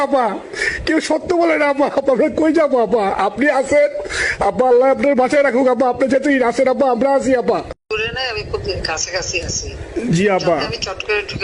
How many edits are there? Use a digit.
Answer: 2